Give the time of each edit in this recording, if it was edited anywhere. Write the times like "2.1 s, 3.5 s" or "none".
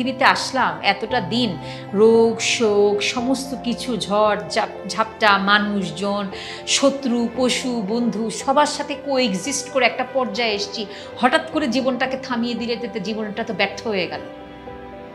none